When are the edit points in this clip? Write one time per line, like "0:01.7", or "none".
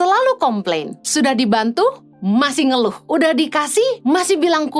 0:01.0
0:03.0
0:04.0